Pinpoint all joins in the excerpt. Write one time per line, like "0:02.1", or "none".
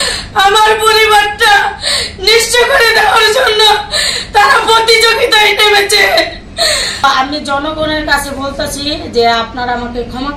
0:07.0